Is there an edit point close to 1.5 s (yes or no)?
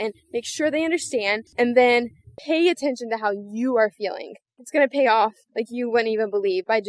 yes